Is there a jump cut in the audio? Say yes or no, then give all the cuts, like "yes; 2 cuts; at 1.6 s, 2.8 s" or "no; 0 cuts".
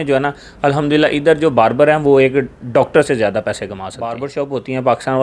yes; 1 cut; at 4.0 s